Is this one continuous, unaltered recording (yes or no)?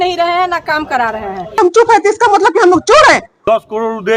no